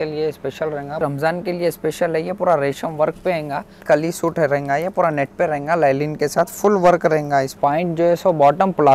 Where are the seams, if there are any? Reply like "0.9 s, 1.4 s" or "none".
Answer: 1.0 s, 3.8 s, 7.5 s